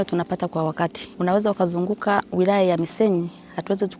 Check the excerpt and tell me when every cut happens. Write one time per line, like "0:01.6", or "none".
0:01.0